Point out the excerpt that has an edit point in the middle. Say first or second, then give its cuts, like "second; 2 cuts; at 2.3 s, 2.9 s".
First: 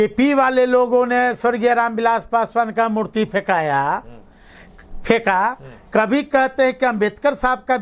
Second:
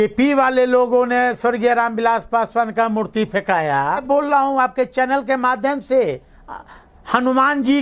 second; 1 cut; at 4.0 s